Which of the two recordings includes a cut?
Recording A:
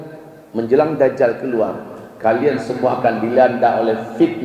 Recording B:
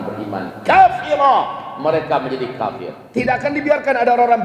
B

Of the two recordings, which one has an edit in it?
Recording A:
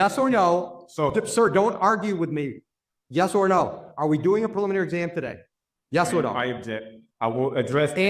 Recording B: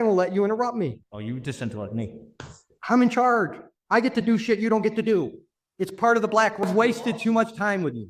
B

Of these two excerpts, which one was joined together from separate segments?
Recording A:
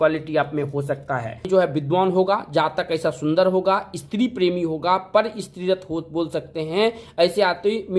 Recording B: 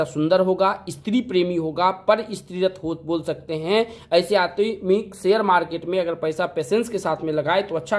A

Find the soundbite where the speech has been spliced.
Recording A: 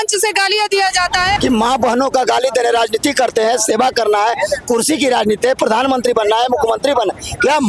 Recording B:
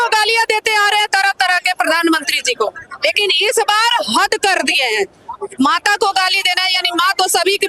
A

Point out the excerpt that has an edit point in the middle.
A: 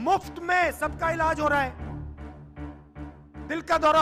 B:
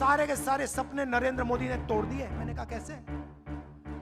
B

